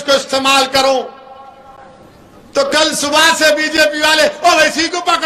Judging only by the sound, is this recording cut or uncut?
uncut